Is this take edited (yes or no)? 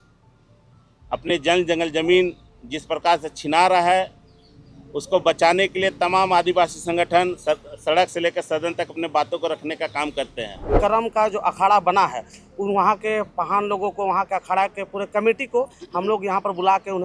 yes